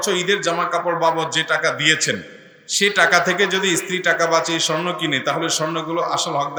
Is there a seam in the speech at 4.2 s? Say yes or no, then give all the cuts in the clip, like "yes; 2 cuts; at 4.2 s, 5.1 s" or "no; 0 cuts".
no; 0 cuts